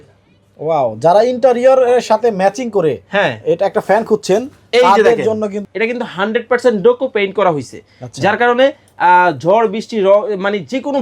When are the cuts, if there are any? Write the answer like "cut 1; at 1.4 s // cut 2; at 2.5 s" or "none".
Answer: cut 1; at 5.6 s